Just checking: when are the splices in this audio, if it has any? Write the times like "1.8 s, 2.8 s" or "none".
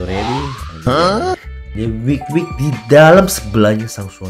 1.6 s